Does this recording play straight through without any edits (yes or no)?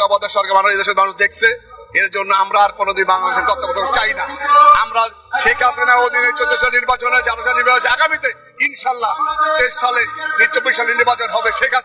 yes